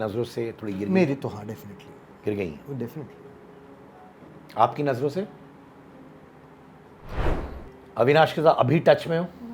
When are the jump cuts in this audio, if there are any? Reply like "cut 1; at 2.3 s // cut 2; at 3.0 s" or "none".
cut 1; at 7.3 s

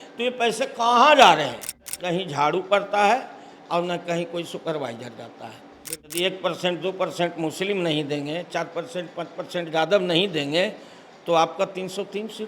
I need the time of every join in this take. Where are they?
cut 1; at 1.9 s // cut 2; at 6.1 s

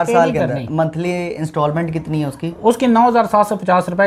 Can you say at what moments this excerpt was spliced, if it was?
none

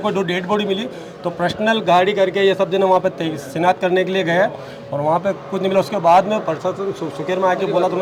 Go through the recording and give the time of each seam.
none

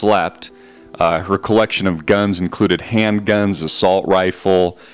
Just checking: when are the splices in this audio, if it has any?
cut 1; at 3.7 s

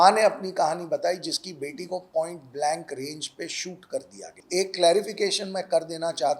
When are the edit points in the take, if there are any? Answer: cut 1; at 4.3 s

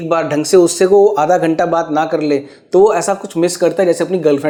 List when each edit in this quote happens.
none

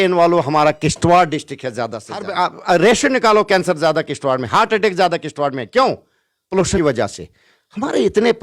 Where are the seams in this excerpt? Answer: cut 1; at 2.3 s // cut 2; at 6.8 s

